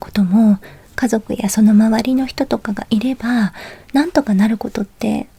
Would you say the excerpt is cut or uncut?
uncut